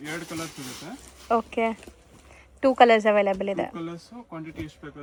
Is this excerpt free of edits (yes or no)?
yes